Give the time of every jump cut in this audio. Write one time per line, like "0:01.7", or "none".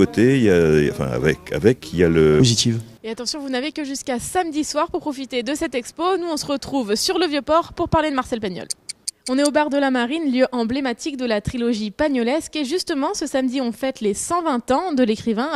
none